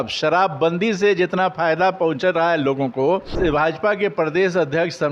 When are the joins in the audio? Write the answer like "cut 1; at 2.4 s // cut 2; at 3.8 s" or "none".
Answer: cut 1; at 3.3 s